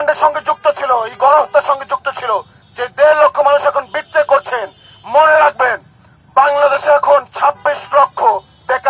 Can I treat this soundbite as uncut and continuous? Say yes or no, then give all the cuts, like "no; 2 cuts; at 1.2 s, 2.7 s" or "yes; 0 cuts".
yes; 0 cuts